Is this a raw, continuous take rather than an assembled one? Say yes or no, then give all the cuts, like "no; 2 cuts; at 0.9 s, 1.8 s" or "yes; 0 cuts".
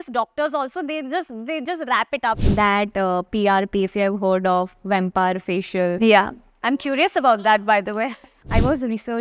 no; 2 cuts; at 2.4 s, 8.3 s